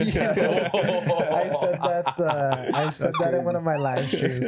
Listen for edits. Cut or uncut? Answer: uncut